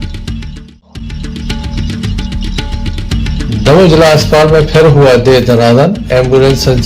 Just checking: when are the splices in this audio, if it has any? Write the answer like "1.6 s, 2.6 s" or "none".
1.2 s, 3.3 s